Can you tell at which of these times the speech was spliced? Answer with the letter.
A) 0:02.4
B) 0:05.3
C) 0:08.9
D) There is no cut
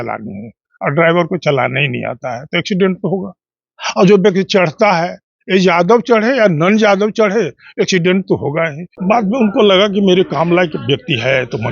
C